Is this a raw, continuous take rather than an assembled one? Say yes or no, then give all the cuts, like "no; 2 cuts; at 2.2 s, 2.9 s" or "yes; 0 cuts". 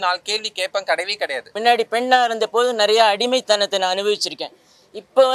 no; 1 cut; at 1.5 s